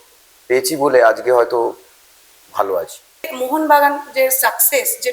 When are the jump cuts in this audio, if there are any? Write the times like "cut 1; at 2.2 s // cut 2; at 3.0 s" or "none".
cut 1; at 3.3 s